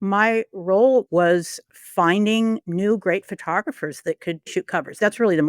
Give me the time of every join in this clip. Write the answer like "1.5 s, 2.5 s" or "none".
1.1 s, 2.7 s, 4.5 s